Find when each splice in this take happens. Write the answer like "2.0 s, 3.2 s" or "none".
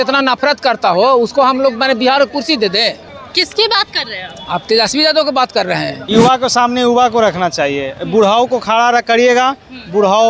3.1 s, 5.9 s